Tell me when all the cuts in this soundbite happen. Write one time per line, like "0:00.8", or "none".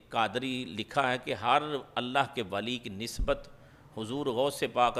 none